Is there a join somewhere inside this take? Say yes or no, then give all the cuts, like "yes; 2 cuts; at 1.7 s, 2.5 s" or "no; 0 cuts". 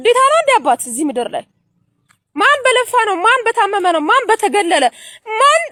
no; 0 cuts